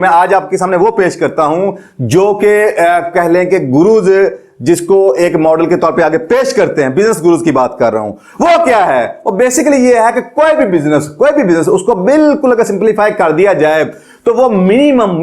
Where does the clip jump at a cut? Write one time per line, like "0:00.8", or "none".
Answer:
none